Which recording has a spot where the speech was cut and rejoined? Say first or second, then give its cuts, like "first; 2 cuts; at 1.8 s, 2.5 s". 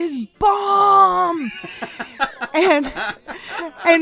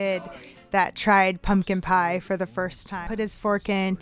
second; 1 cut; at 3.0 s